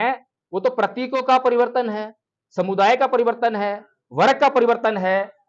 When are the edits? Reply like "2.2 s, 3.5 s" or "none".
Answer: none